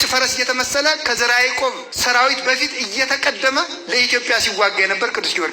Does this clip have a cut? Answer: yes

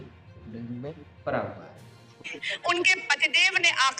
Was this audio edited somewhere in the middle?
yes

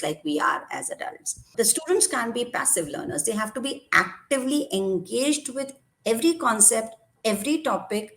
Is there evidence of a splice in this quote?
yes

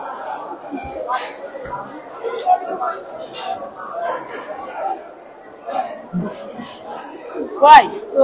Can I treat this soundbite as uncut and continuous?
yes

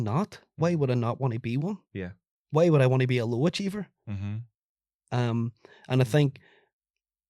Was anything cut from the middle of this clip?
no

